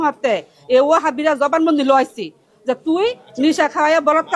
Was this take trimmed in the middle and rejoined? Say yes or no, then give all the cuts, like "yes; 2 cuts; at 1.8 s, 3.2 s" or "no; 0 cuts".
no; 0 cuts